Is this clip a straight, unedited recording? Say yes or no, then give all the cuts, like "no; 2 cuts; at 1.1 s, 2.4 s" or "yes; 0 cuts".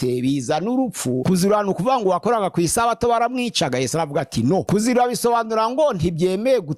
no; 2 cuts; at 1.2 s, 4.6 s